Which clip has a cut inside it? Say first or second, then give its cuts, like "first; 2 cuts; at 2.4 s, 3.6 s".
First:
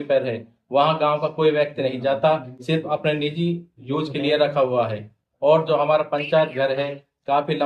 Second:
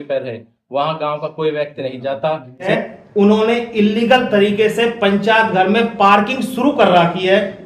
second; 1 cut; at 2.7 s